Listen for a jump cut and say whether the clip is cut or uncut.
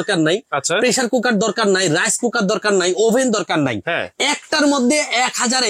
uncut